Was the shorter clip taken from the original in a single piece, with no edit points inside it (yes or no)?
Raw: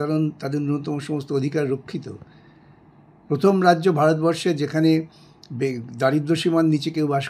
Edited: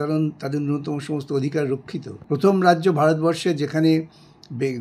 no